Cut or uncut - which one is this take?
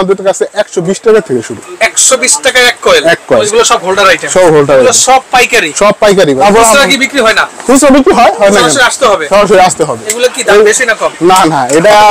cut